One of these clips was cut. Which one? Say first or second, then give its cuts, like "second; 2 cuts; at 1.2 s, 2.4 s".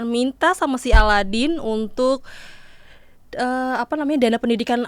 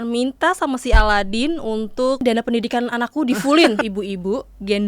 second; 2 cuts; at 2.2 s, 3.8 s